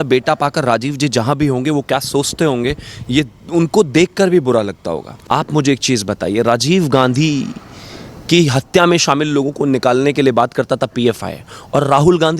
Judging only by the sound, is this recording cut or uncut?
cut